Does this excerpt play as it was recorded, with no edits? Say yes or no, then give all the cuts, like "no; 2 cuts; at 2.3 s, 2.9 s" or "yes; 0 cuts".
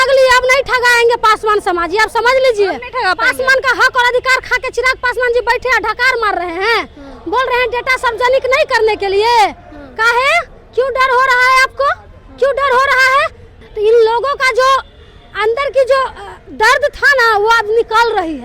yes; 0 cuts